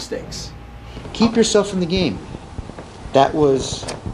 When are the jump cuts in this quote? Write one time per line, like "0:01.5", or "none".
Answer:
0:01.0